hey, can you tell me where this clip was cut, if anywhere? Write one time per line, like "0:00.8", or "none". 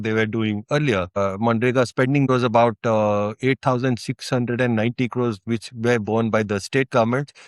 0:01.1
0:02.3